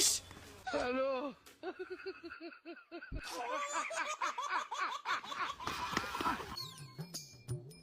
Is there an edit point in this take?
yes; 1 cut; at 6.5 s

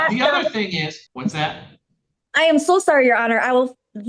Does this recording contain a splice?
yes; 1 cut; at 1.0 s

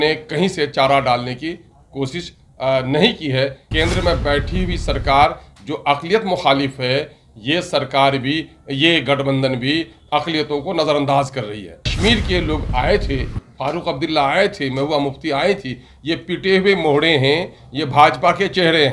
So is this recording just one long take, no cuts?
no; 2 cuts; at 3.6 s, 11.8 s

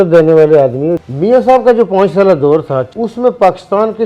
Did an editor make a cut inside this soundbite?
yes; 2 cuts; at 1.1 s, 2.9 s

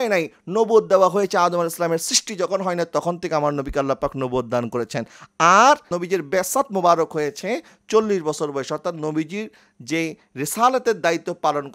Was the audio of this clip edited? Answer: no; 0 cuts

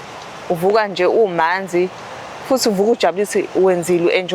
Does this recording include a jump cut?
no; 0 cuts

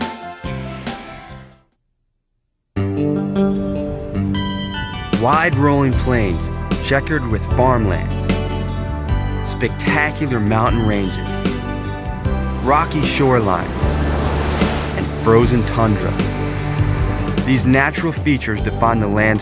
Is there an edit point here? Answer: yes; 1 cut; at 15.1 s

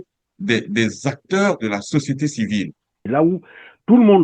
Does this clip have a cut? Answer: yes; 1 cut; at 3.1 s

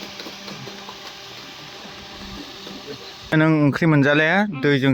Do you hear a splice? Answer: yes; 1 cut; at 3.3 s

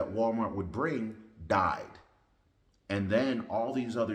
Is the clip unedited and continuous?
yes; 0 cuts

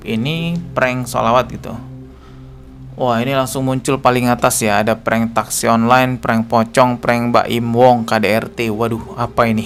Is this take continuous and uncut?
yes; 0 cuts

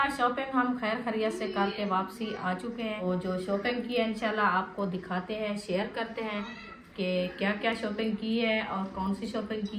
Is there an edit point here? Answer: yes; 1 cut; at 3.0 s

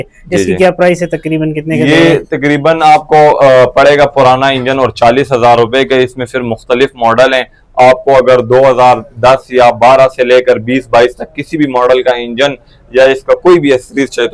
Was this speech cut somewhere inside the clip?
no; 0 cuts

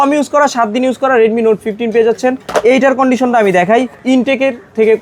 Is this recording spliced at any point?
no; 0 cuts

